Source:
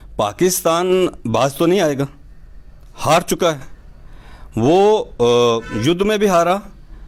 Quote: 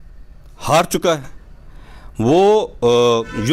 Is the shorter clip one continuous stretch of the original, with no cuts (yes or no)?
yes